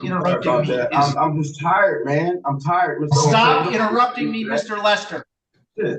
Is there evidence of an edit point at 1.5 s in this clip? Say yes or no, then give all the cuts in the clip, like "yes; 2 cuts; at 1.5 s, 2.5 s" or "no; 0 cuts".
no; 0 cuts